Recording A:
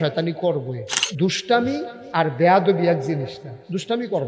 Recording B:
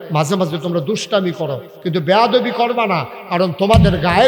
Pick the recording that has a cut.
A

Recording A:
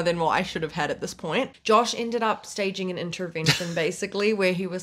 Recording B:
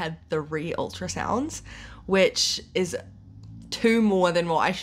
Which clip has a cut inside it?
A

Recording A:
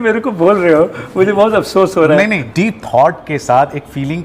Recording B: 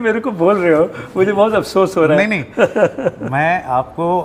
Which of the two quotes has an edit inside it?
A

